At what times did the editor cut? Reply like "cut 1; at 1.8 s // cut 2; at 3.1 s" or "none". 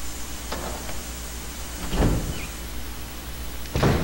cut 1; at 1.2 s